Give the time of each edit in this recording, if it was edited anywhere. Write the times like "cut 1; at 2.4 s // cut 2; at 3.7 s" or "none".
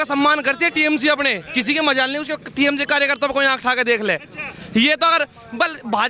none